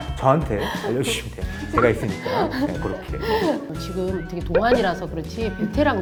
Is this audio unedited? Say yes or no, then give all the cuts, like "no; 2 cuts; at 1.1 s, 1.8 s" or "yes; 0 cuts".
yes; 0 cuts